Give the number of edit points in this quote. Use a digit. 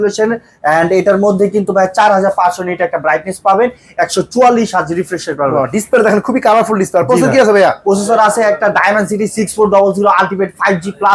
0